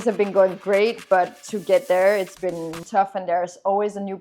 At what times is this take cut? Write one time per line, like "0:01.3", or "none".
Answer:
0:02.7

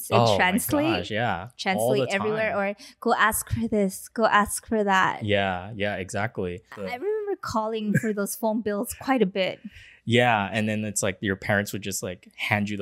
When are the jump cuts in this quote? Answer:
0:06.8

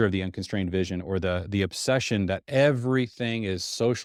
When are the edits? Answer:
none

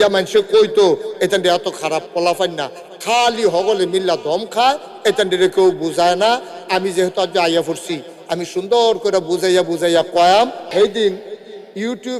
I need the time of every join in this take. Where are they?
0:10.7

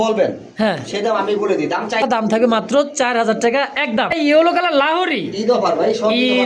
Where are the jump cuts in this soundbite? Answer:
0:02.0
0:04.2

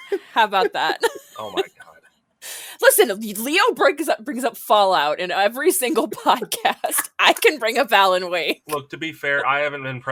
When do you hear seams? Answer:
none

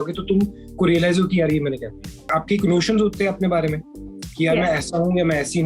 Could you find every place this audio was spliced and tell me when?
0:02.4

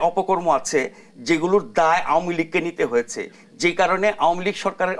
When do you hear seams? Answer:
none

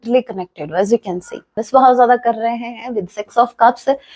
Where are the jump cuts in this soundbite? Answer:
0:01.5

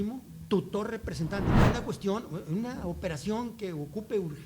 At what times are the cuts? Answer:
0:01.6

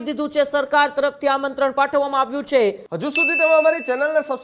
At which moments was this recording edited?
0:02.9

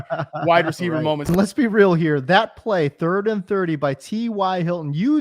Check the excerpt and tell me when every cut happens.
0:01.2

